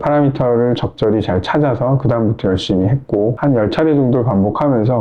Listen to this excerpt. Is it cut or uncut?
uncut